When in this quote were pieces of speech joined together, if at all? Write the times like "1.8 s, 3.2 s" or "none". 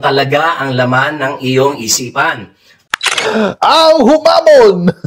2.7 s